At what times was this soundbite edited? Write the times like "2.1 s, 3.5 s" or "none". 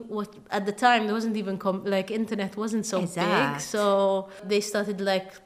4.4 s